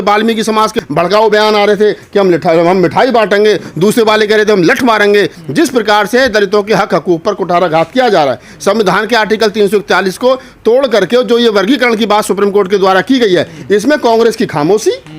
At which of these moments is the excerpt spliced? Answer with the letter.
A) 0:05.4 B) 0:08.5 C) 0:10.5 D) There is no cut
A